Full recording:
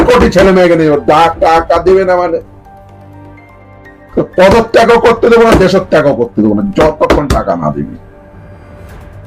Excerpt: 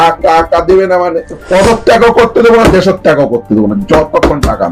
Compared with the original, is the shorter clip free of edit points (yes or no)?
no